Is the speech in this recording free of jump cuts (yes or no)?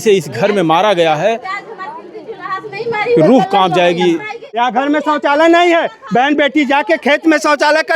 no